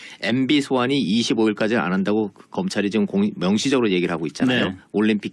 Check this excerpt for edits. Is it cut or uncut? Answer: cut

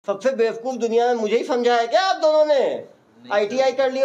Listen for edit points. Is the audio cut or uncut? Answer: uncut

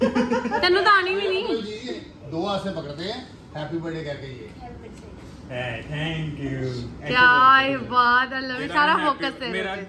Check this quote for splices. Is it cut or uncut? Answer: uncut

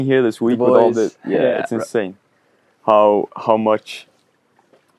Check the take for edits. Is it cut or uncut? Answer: uncut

